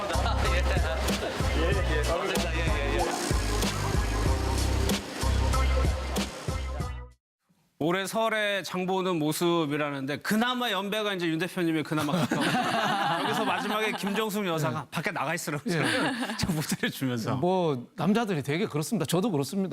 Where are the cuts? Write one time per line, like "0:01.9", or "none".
0:18.3